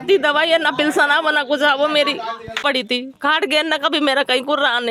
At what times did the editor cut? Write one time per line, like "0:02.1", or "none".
0:02.6